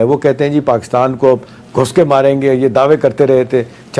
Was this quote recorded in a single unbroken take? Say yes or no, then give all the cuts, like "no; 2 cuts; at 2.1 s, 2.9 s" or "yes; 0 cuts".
yes; 0 cuts